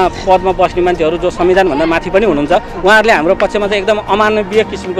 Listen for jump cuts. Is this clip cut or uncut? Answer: uncut